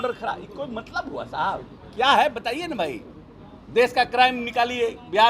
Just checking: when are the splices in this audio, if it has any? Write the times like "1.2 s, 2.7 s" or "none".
none